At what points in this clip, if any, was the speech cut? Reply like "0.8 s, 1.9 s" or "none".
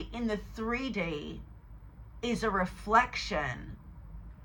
none